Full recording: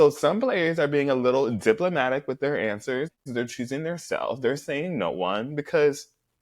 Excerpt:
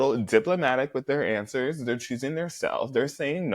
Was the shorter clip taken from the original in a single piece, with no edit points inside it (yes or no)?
no